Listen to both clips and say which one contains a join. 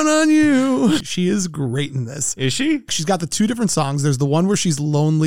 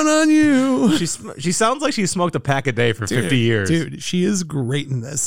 first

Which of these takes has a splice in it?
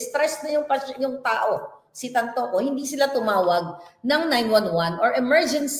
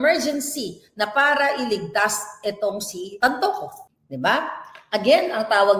second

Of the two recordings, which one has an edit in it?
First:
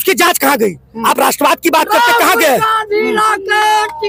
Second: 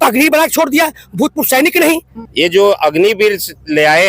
second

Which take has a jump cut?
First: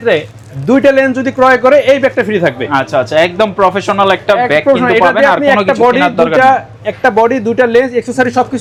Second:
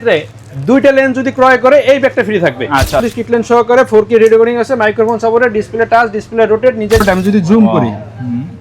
second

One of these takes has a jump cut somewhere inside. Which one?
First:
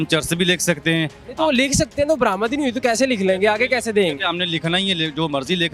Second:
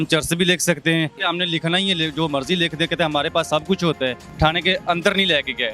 second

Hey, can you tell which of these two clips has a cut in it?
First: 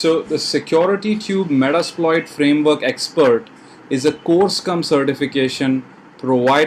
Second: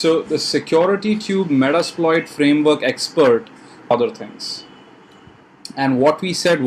first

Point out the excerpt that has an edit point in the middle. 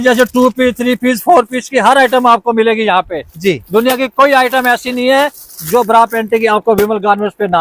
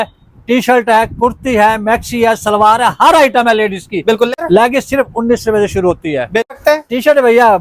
second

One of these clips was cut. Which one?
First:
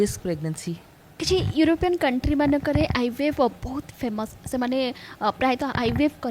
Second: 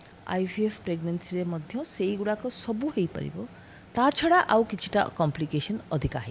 first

